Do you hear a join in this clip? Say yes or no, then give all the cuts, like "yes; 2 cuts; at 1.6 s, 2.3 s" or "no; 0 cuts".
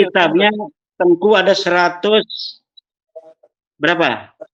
no; 0 cuts